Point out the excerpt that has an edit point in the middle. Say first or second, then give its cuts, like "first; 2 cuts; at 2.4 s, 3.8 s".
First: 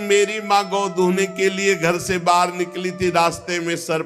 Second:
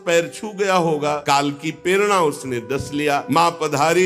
second; 2 cuts; at 1.2 s, 3.2 s